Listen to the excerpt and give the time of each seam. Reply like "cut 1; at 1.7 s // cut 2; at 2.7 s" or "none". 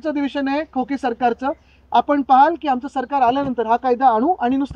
none